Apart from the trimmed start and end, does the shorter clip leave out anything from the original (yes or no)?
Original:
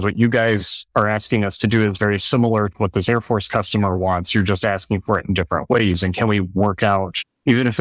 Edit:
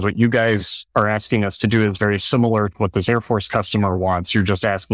no